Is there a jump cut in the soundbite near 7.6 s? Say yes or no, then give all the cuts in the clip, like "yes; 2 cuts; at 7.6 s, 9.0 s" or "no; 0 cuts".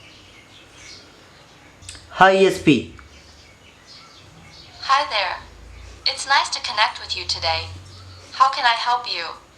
no; 1 cut; at 1.8 s